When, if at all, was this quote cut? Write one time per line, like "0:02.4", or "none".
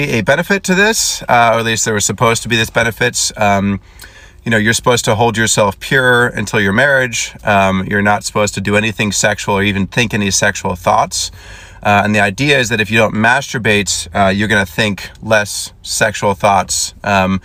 none